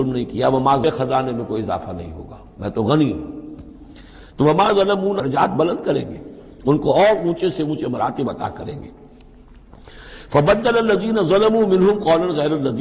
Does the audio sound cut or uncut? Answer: cut